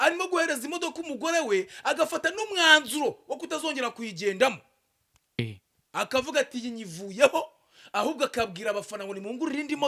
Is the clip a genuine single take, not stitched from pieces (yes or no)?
yes